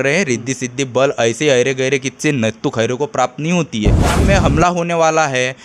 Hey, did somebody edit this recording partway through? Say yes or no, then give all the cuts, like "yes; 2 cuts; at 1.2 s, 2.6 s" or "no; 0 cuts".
yes; 1 cut; at 4.2 s